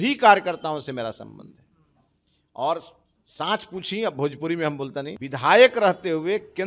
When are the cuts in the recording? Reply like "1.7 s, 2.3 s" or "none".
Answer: 5.2 s